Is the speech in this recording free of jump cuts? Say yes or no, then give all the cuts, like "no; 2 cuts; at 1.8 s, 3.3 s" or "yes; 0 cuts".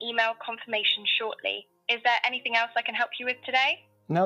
yes; 0 cuts